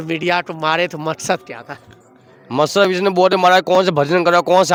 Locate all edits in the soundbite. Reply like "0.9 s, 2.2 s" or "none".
none